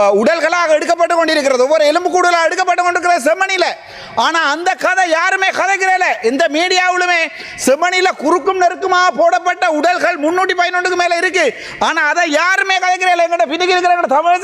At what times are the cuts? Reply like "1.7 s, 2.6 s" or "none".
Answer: none

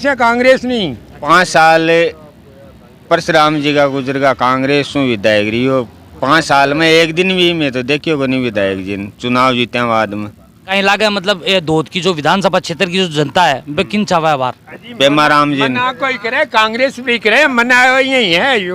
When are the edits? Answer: 1.1 s, 10.6 s

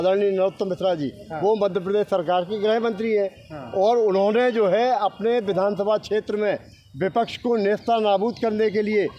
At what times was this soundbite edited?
none

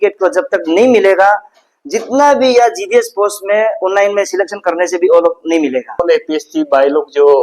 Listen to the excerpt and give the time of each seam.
6.0 s

